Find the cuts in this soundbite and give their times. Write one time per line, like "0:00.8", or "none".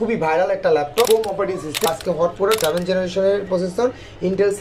0:01.9